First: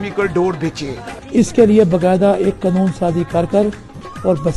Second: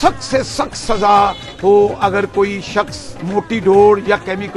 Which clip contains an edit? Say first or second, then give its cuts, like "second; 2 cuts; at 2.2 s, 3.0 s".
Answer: first; 1 cut; at 1.1 s